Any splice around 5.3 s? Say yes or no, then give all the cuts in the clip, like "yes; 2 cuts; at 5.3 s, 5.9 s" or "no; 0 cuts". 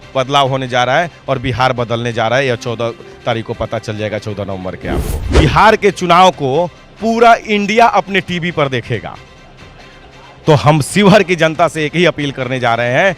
yes; 1 cut; at 5.3 s